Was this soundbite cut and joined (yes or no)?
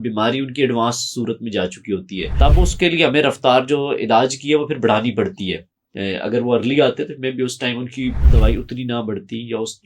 yes